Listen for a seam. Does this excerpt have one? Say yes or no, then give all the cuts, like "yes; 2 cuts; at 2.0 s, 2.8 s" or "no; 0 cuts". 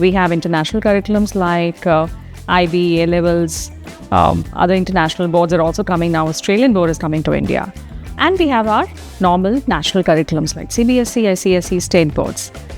no; 0 cuts